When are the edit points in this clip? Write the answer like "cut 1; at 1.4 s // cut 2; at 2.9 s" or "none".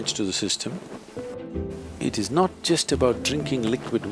cut 1; at 1.4 s